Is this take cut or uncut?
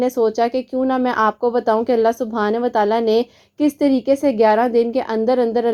uncut